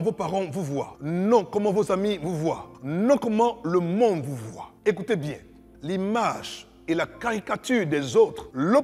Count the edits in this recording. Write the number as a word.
zero